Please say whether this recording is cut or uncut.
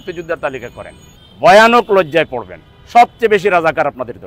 uncut